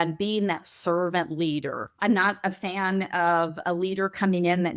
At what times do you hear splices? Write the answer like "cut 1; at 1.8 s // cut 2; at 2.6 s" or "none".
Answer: cut 1; at 1.9 s